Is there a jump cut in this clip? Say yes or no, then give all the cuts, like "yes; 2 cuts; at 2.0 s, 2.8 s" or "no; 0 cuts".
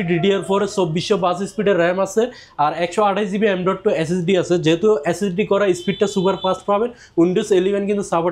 no; 0 cuts